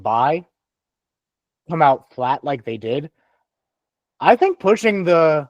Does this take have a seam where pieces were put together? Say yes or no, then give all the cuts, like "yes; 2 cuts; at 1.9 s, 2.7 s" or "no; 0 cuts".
no; 0 cuts